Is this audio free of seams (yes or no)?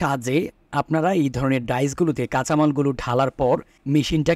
yes